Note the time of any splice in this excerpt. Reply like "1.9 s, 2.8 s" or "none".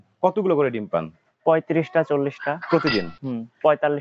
none